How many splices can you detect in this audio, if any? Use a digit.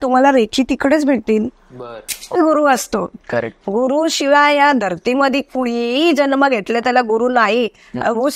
1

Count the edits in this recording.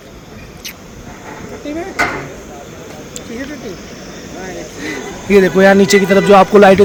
0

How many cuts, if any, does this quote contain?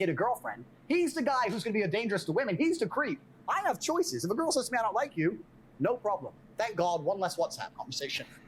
0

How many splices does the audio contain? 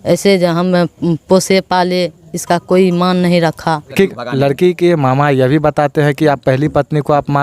1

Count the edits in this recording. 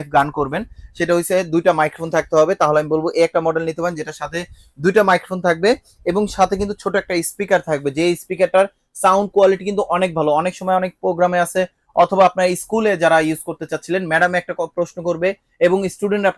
0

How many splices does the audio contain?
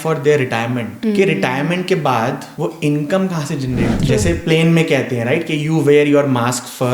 3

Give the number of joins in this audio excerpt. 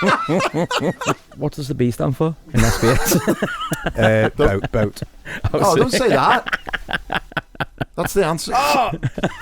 1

